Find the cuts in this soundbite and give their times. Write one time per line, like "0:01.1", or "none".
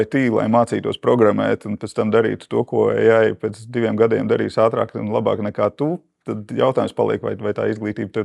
none